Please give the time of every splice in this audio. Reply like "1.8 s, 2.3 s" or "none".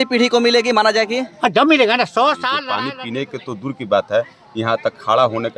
2.7 s